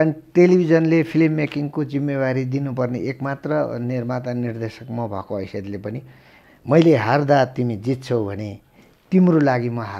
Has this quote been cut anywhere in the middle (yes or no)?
yes